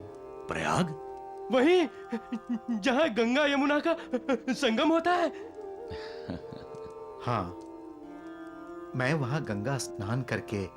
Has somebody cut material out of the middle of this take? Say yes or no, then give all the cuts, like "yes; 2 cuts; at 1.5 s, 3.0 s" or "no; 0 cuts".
no; 0 cuts